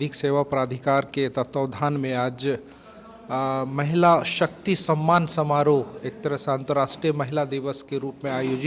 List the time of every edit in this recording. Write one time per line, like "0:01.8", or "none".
none